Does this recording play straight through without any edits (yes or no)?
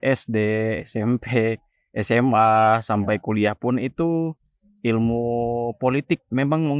yes